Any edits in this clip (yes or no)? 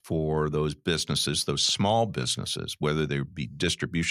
no